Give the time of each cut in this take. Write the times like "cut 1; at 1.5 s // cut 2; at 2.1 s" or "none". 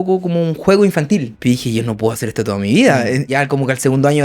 cut 1; at 1.3 s // cut 2; at 3.3 s